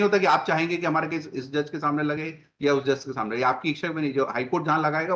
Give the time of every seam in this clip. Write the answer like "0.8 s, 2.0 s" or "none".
none

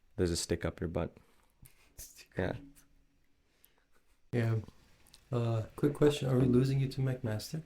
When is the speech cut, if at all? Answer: 4.2 s

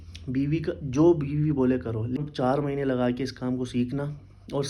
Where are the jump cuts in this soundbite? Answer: 2.2 s

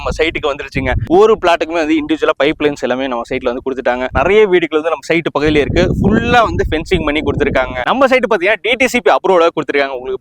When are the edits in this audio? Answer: 1.0 s, 4.1 s, 7.9 s

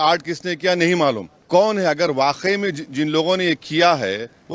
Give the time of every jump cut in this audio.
1.3 s

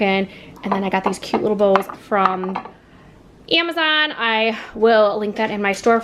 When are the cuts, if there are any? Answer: none

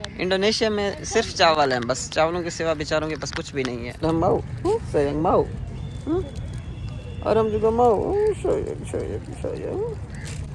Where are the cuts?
3.9 s

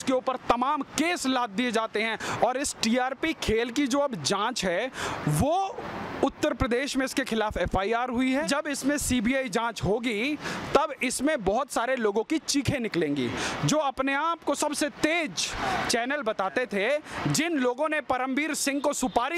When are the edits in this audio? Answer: 2.2 s, 8.5 s

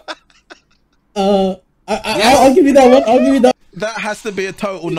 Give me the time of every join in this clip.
3.5 s

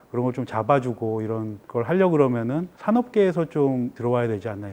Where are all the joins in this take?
1.6 s, 2.7 s, 3.9 s

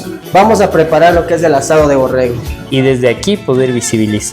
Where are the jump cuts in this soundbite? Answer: 2.5 s

